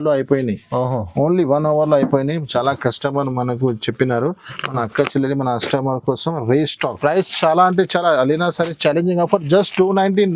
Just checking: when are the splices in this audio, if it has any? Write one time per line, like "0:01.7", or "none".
0:07.0